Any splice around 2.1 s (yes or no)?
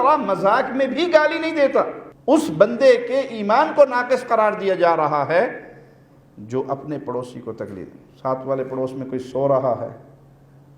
yes